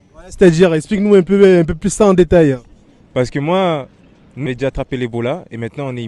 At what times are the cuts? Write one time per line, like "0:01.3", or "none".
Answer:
0:04.5